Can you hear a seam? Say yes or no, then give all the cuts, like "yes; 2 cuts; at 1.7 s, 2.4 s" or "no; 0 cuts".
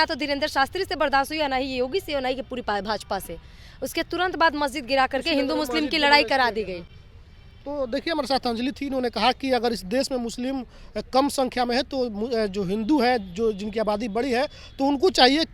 no; 0 cuts